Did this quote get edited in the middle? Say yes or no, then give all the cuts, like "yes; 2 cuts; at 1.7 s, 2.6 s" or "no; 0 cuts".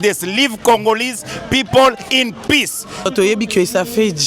yes; 1 cut; at 3.1 s